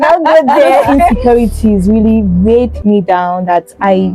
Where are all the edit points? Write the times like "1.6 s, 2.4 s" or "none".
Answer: 0.9 s